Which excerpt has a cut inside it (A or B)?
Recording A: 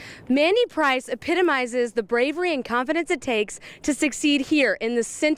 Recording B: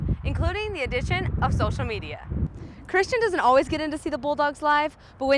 B